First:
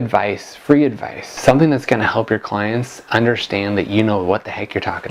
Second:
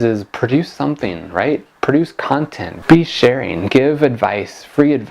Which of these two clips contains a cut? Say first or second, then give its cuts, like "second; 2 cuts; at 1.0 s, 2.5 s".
second; 1 cut; at 2.8 s